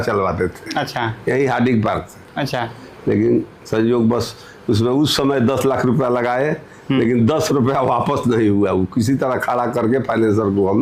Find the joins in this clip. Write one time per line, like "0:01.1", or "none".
none